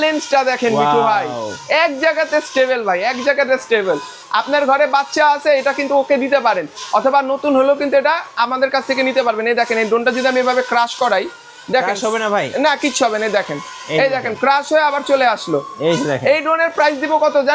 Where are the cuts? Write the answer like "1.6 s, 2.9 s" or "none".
none